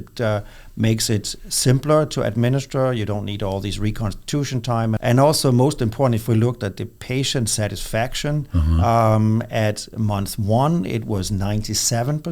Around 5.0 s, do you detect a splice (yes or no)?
yes